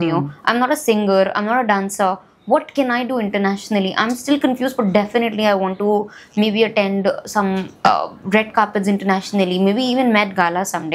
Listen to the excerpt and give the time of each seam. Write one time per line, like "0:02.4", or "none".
none